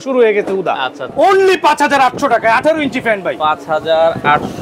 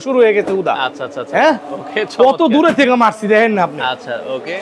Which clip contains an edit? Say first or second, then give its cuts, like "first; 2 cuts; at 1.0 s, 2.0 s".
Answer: first; 1 cut; at 1.0 s